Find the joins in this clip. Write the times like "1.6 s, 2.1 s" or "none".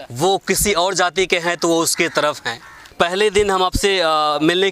2.8 s